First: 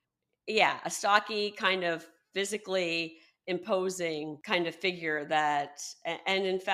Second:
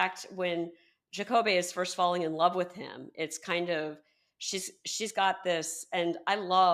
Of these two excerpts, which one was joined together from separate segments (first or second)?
first